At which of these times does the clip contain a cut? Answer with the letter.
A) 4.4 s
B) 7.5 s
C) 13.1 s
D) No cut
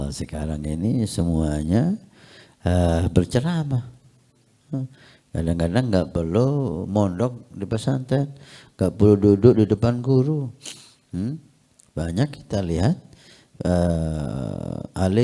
D